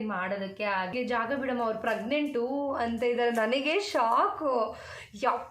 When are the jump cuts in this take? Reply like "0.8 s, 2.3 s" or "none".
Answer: 0.9 s